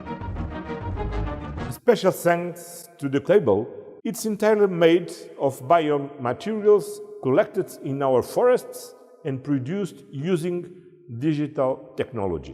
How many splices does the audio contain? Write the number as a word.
three